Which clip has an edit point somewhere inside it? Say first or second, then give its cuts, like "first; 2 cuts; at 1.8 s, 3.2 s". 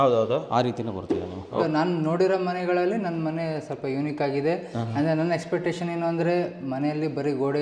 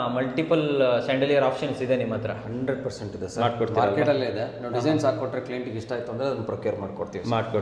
first; 1 cut; at 1.5 s